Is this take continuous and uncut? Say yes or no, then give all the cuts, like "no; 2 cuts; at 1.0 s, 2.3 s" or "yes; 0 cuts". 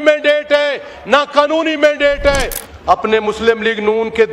no; 1 cut; at 2.6 s